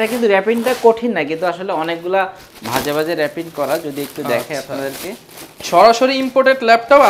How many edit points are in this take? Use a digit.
0